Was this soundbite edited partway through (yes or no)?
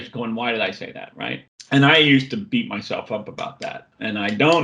yes